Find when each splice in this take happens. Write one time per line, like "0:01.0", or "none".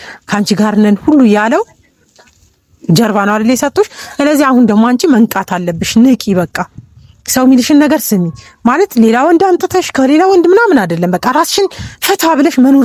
none

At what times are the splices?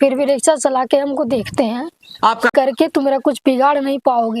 0:02.5

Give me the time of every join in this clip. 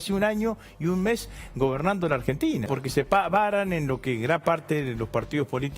0:02.7

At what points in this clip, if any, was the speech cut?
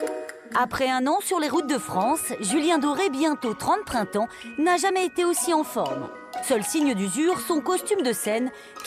0:01.6

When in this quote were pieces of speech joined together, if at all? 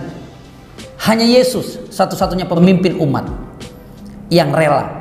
0:02.6

